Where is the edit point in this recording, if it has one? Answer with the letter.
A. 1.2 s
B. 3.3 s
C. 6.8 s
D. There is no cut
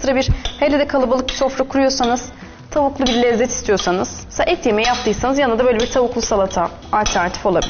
C